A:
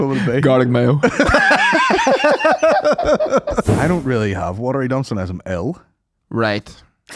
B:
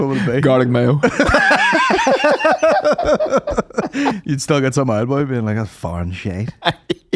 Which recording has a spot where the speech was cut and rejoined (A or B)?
A